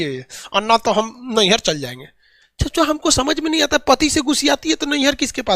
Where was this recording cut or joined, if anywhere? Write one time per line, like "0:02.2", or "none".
none